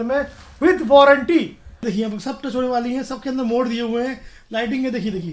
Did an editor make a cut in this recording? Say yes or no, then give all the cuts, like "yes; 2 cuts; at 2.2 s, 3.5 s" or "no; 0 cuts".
yes; 1 cut; at 1.8 s